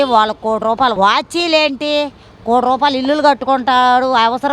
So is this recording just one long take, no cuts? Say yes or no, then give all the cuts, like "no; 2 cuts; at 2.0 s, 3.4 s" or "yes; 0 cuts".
no; 1 cut; at 0.9 s